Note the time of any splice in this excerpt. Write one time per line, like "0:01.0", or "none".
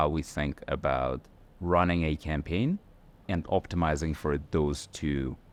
none

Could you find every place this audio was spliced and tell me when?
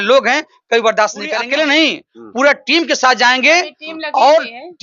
0:01.4

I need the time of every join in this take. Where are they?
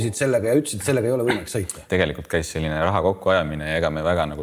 0:01.8

